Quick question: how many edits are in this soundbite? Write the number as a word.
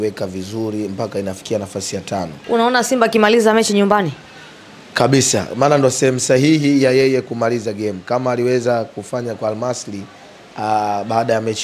one